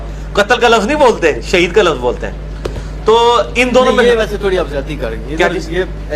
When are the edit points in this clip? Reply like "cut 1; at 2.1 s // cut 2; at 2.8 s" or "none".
none